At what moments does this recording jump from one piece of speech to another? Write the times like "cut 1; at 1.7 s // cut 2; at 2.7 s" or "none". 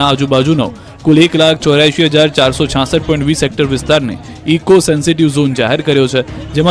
cut 1; at 3.9 s